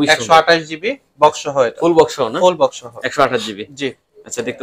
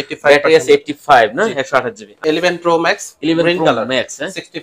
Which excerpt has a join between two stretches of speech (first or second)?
second